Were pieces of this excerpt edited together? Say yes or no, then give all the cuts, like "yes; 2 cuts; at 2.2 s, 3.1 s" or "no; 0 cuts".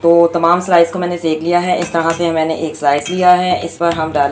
no; 0 cuts